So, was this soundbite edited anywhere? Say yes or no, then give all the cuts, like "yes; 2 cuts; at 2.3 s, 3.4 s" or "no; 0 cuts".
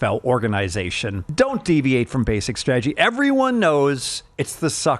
yes; 1 cut; at 1.2 s